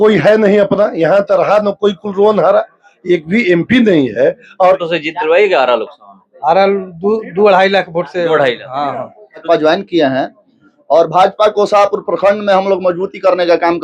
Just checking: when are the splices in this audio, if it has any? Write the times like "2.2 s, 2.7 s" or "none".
4.8 s, 9.4 s

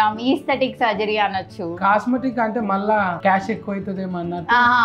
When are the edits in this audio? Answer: none

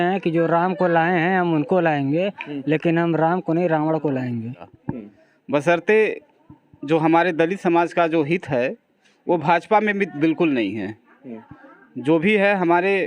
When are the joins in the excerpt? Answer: 4.8 s

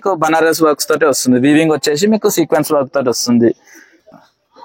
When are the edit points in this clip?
none

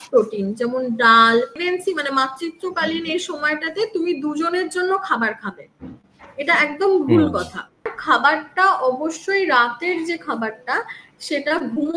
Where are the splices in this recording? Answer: 1.6 s, 8.0 s

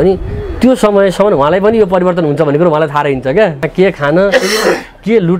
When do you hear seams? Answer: 3.7 s

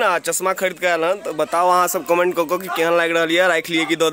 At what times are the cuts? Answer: none

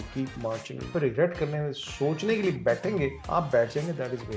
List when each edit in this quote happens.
0.9 s, 3.2 s

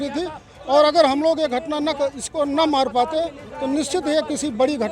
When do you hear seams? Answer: none

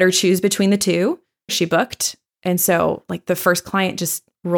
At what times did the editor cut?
1.5 s

